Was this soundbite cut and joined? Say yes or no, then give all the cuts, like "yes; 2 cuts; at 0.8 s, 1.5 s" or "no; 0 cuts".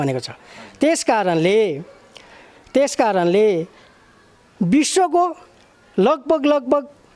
no; 0 cuts